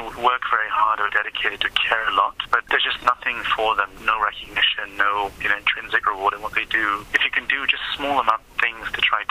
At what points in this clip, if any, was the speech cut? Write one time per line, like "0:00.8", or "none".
0:02.6
0:03.9
0:05.4
0:07.1